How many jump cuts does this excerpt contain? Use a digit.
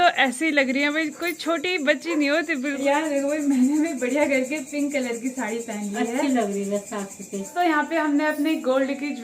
2